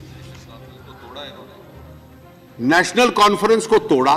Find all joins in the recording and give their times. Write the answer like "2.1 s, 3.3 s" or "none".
none

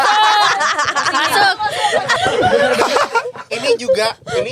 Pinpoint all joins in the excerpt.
2.1 s

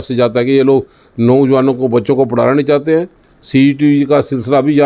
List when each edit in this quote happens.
none

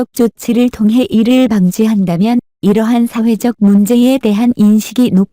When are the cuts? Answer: 1.3 s

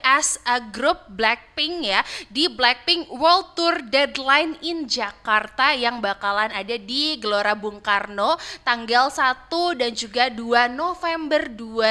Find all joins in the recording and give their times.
none

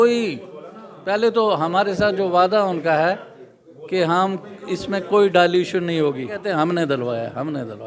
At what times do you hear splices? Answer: 6.4 s

